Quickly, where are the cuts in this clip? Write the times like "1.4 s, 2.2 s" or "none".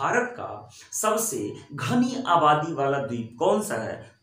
none